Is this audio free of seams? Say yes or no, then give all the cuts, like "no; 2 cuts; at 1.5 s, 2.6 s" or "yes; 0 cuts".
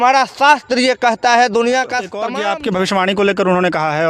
no; 1 cut; at 2.2 s